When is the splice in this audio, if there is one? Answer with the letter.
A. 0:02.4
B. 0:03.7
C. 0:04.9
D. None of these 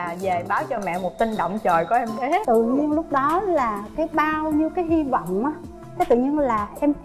A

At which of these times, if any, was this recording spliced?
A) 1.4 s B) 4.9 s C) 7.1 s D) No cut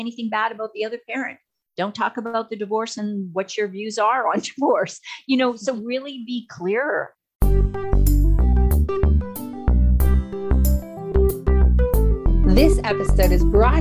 C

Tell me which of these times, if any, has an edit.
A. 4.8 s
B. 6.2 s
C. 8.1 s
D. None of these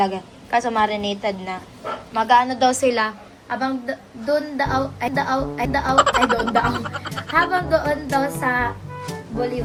D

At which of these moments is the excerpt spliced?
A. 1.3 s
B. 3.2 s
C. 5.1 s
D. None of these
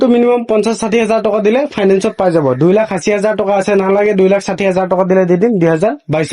D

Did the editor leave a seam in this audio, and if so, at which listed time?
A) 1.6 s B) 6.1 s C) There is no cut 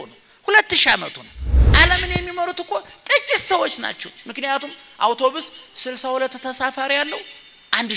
A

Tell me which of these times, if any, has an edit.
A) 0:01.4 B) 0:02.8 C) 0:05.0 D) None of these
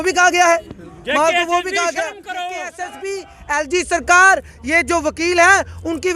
B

